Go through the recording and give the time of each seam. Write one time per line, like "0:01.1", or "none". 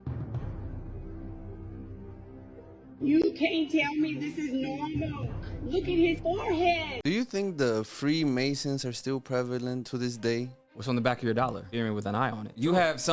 0:06.9

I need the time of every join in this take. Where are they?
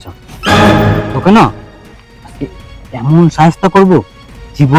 none

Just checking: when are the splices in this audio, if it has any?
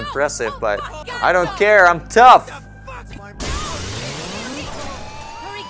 0:01.0

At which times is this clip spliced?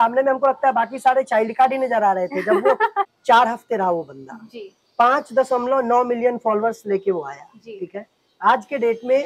0:03.1

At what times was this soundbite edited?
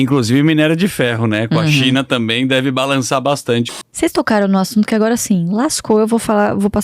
0:03.7

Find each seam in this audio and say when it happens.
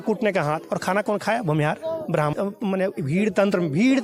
0:02.3

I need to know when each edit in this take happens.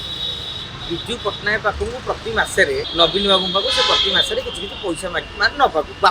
0:02.9

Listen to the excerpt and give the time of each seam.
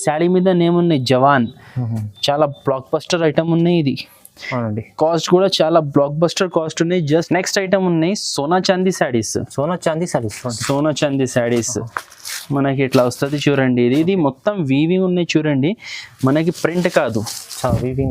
0:07.3

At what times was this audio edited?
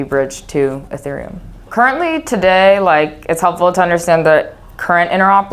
0:01.6

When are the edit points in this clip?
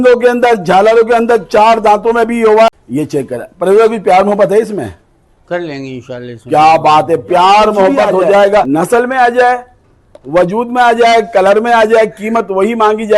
0:02.7
0:08.7

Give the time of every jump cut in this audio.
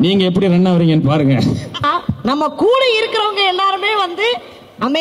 0:01.8

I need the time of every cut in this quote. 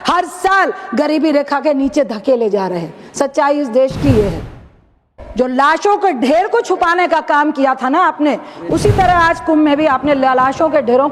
0:05.0

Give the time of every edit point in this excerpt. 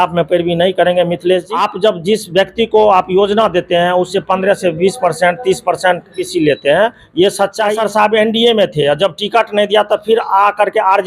0:01.5
0:06.2
0:07.7

